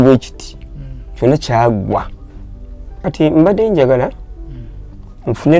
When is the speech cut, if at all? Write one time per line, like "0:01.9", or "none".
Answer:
0:02.9